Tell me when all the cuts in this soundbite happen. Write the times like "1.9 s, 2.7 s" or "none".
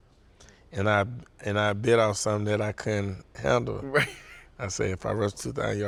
none